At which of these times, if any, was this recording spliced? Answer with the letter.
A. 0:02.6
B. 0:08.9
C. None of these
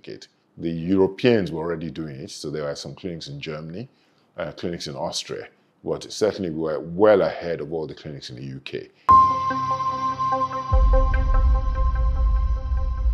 B